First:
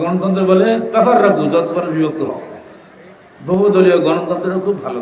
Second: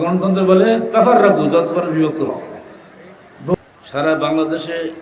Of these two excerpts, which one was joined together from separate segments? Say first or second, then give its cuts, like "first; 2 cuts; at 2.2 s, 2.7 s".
second; 1 cut; at 3.5 s